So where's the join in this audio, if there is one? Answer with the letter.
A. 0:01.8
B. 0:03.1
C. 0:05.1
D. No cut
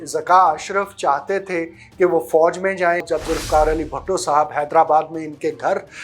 B